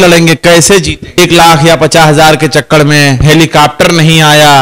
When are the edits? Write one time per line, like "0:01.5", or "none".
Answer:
0:01.2